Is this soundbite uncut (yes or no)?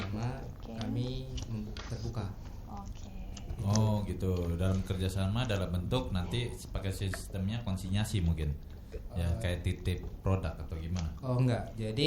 yes